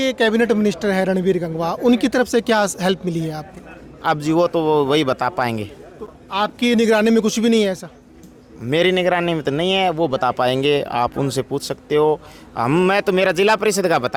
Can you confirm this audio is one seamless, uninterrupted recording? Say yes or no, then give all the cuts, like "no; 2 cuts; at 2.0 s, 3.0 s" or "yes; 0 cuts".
yes; 0 cuts